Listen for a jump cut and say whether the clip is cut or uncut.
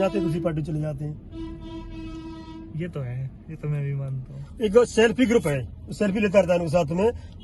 cut